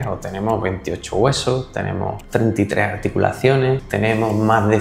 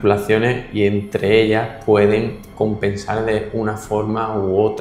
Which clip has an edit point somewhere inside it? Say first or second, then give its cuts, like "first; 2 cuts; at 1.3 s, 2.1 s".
first; 2 cuts; at 2.2 s, 3.9 s